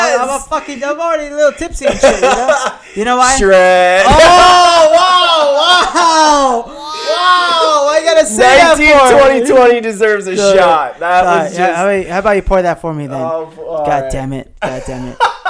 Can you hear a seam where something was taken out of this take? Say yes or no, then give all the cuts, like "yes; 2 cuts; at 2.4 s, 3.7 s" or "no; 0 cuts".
no; 0 cuts